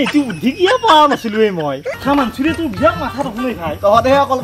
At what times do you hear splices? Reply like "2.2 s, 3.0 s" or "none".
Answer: 1.9 s

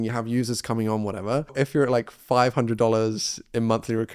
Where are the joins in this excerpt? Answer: 1.5 s

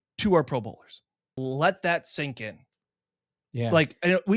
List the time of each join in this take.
1.4 s

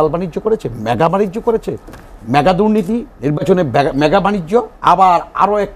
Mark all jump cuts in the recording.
3.1 s, 4.7 s

